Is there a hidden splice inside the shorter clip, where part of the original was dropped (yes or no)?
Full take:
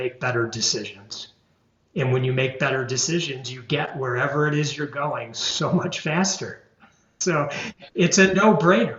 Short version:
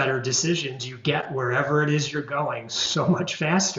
no